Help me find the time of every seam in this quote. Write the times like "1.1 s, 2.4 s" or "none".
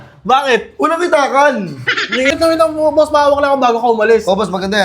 2.3 s